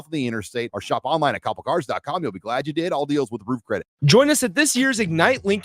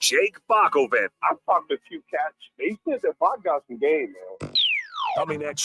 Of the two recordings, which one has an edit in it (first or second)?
first